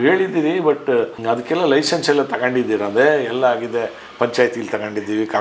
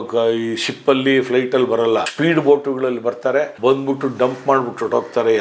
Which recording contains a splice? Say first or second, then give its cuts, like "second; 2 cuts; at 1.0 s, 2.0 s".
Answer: second; 2 cuts; at 2.1 s, 3.5 s